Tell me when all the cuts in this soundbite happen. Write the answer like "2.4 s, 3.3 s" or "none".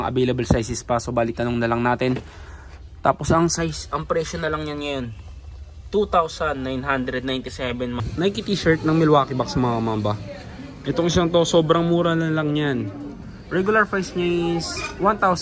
8.0 s